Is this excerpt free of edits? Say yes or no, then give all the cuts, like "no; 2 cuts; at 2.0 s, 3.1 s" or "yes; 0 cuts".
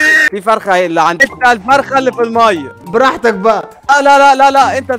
no; 3 cuts; at 1.2 s, 2.7 s, 3.7 s